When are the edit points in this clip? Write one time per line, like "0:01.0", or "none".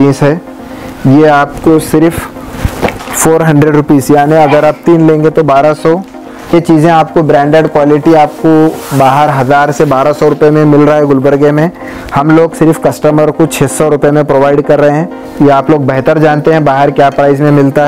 0:06.5
0:15.2